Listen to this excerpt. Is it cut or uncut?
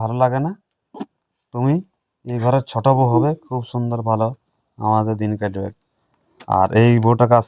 uncut